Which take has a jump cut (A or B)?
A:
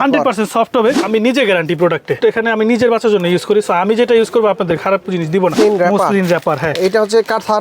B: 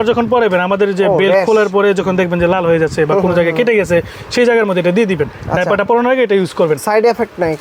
A